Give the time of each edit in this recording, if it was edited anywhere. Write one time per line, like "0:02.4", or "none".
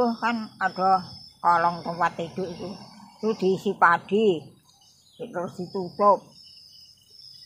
none